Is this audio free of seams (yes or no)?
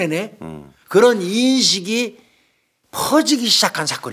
yes